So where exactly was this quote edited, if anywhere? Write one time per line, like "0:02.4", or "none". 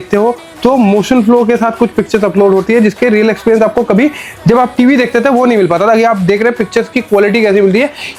none